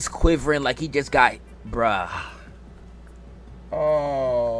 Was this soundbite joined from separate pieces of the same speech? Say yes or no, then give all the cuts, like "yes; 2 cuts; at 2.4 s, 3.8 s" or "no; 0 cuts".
no; 0 cuts